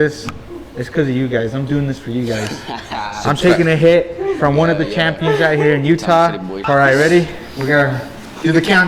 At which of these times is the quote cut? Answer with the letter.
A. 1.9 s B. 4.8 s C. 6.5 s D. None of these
C